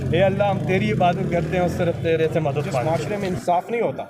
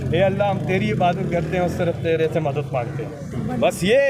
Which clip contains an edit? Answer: first; 1 cut; at 2.8 s

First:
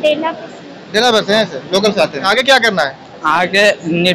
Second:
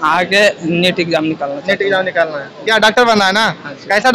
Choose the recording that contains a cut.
first; 1 cut; at 2.2 s

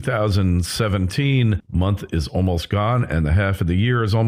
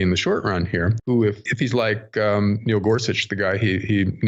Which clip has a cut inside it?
second; 1 cut; at 1.1 s

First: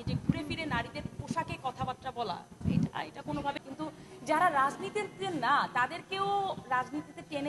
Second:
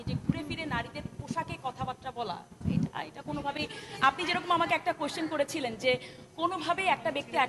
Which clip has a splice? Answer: first; 1 cut; at 3.6 s

